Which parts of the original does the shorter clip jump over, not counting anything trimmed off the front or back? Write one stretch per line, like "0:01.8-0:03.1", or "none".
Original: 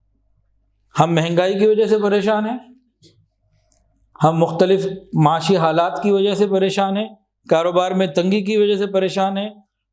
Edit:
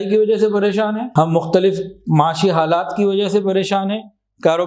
0:02.6-0:04.1